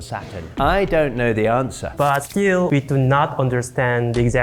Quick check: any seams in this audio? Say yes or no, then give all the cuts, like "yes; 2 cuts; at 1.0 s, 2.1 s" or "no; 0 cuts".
yes; 1 cut; at 1.9 s